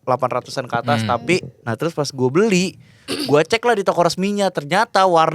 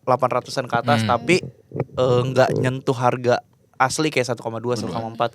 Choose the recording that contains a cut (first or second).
first